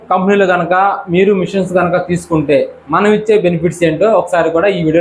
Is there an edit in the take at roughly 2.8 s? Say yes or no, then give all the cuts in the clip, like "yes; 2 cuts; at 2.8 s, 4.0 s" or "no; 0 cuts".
no; 0 cuts